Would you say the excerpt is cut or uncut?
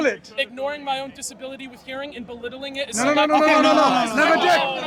uncut